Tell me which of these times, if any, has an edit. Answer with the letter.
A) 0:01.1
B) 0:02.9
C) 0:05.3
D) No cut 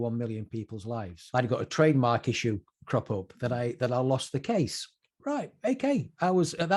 A